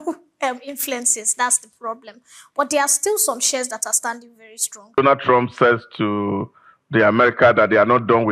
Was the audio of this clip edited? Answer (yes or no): yes